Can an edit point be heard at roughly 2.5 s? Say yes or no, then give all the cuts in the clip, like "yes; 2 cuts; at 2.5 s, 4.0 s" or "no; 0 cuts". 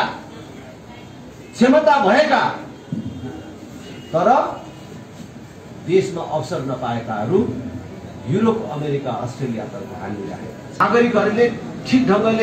no; 1 cut; at 10.8 s